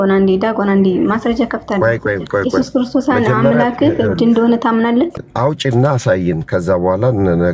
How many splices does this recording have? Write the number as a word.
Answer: one